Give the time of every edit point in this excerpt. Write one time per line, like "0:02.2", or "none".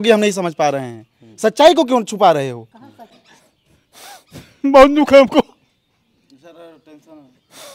0:03.2